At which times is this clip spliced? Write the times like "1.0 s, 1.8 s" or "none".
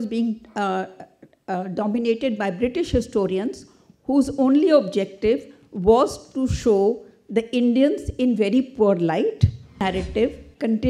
9.8 s